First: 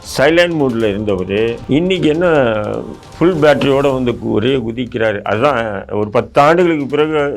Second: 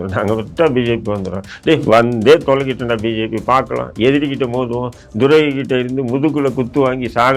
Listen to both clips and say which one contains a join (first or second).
first